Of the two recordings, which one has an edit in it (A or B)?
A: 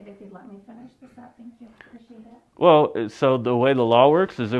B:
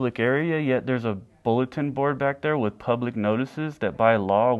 A